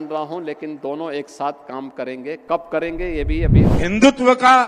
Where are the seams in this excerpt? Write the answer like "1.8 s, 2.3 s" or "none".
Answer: 3.6 s